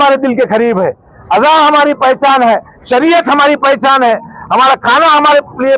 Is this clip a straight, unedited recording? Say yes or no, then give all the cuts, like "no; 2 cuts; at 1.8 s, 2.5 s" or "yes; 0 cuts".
yes; 0 cuts